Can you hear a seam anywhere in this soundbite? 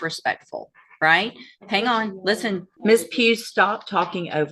yes; 1 cut; at 2.7 s

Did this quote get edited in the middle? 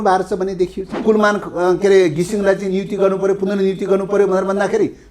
yes; 1 cut; at 1.0 s

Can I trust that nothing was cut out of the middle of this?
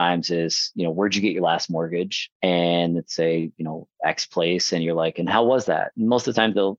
yes; 0 cuts

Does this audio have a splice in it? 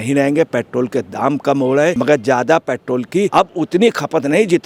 yes; 2 cuts; at 2.0 s, 3.3 s

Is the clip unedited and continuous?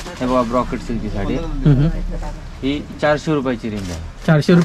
yes; 0 cuts

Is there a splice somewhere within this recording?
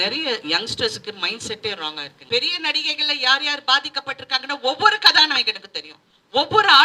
yes; 1 cut; at 2.1 s

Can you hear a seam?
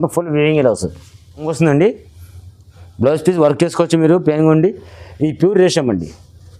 yes; 1 cut; at 1.5 s

